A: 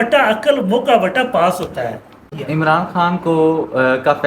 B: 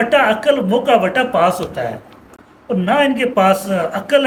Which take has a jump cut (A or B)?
A